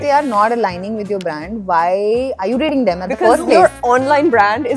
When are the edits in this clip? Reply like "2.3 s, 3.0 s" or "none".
none